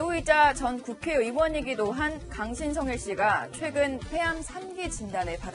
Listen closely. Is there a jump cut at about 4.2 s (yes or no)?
yes